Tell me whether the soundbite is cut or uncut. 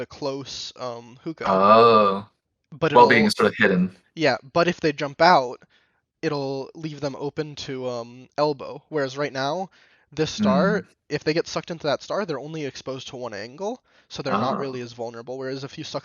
cut